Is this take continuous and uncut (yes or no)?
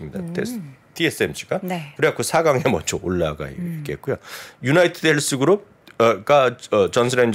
yes